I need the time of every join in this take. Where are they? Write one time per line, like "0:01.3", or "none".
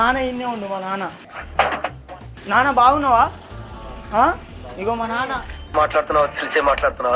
none